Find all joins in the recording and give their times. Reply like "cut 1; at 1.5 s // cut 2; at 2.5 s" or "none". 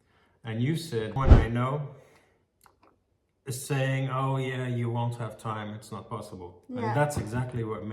cut 1; at 1.2 s